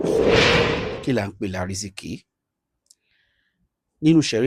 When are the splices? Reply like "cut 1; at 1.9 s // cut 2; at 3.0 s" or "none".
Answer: cut 1; at 0.9 s